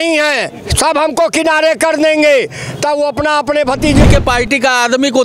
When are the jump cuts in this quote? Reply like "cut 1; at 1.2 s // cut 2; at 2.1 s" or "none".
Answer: cut 1; at 4.1 s